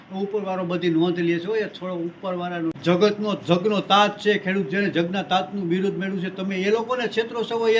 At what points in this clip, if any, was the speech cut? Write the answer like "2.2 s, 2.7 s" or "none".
2.8 s